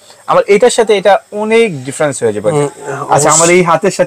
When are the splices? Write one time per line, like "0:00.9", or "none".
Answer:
0:02.5